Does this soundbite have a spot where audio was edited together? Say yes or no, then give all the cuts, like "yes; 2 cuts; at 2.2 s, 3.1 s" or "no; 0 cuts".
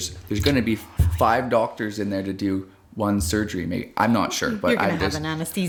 no; 0 cuts